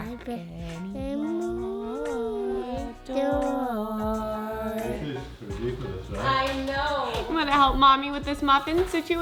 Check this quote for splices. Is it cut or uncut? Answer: uncut